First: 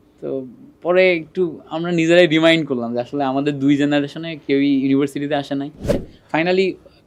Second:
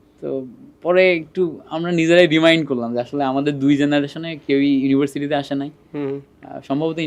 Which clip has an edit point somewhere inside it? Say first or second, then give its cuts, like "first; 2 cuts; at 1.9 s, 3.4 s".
first; 1 cut; at 6.0 s